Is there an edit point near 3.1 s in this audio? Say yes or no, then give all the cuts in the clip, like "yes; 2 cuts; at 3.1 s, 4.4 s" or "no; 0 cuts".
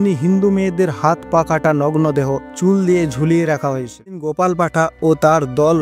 no; 1 cut; at 4.4 s